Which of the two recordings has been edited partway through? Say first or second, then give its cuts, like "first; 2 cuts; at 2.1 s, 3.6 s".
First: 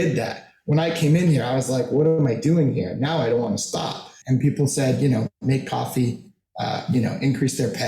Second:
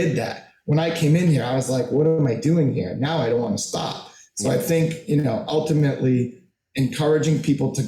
first; 1 cut; at 4.1 s